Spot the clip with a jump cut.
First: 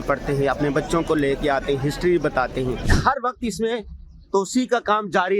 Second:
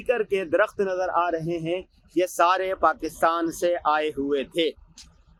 first; 1 cut; at 2.9 s

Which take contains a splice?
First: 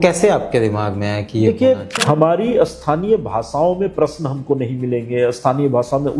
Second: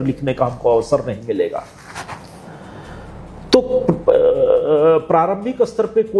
first; 1 cut; at 2.0 s

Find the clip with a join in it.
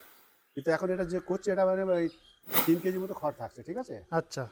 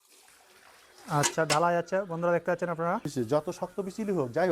second; 1 cut; at 3.3 s

